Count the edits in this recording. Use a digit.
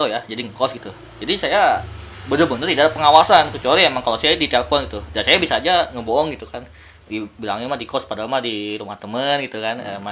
0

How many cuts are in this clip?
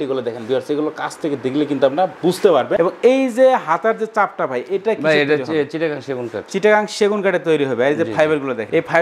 0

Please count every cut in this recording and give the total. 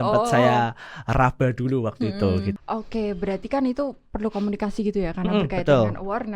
1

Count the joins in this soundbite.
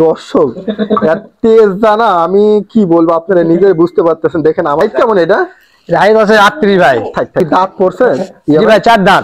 2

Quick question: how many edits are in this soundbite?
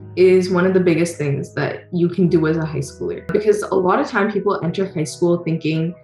0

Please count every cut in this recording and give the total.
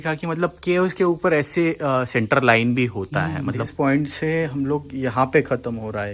1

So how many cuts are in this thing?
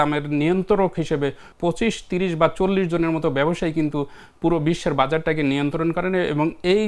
1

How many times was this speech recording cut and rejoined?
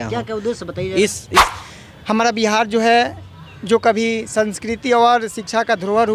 1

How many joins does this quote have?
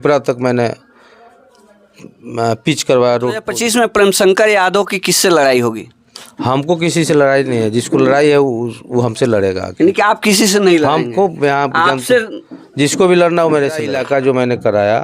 2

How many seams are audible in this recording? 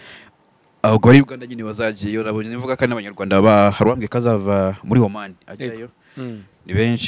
0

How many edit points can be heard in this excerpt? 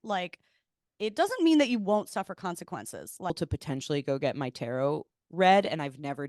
1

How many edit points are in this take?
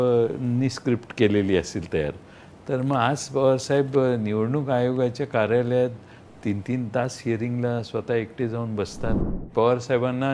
1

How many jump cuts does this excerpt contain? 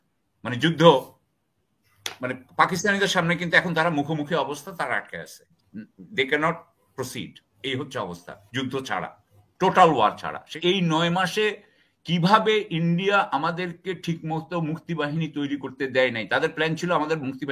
1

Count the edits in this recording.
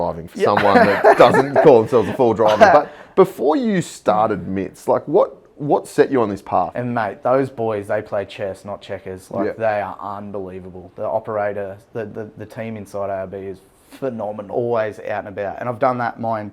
2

